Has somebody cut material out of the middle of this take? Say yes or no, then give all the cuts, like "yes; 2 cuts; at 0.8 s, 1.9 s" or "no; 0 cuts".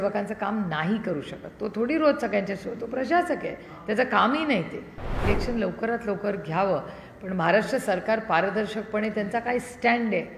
yes; 1 cut; at 5.2 s